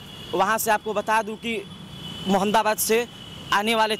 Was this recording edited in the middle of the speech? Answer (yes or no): no